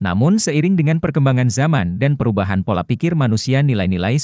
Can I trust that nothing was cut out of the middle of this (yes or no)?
yes